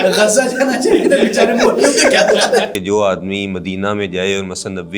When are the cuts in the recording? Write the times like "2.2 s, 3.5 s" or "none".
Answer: 2.7 s

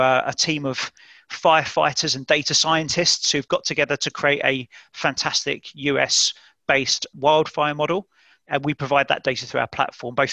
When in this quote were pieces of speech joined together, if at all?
7.1 s, 8.5 s

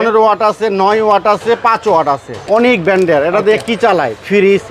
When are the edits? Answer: 2.4 s

